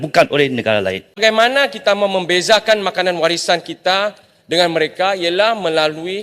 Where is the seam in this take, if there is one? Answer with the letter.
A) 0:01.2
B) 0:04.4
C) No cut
A